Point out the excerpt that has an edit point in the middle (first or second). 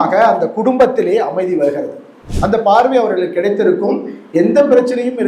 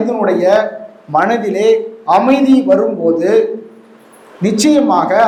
first